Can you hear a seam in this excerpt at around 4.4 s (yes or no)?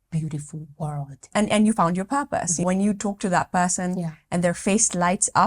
no